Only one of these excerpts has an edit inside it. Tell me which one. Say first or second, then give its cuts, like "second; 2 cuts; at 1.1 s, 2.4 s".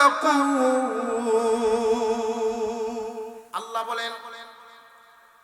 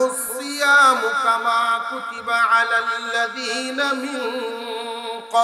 first; 1 cut; at 3.3 s